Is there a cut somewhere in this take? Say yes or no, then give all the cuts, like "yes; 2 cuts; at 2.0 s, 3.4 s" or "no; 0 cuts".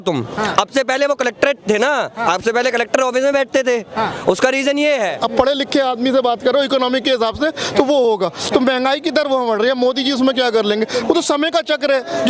yes; 1 cut; at 5.2 s